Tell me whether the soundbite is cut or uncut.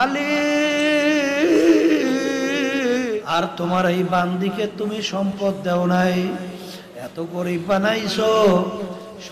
cut